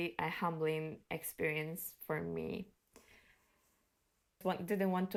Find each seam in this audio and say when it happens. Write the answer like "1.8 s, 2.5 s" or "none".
none